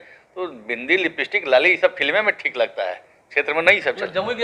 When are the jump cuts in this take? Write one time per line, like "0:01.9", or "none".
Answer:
none